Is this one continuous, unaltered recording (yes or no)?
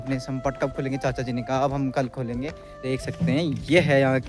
no